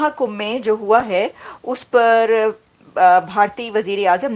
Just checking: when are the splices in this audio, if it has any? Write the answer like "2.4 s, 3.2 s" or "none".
none